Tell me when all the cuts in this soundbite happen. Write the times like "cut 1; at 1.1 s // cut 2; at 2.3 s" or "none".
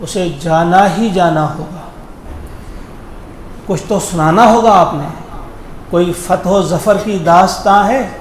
cut 1; at 2.3 s